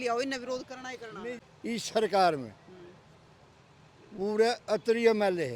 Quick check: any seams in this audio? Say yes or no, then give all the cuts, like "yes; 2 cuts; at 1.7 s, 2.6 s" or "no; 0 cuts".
yes; 1 cut; at 1.4 s